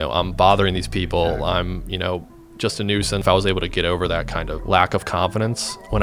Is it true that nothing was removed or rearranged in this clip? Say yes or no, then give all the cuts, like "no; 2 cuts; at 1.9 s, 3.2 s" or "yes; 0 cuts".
no; 2 cuts; at 3.2 s, 4.5 s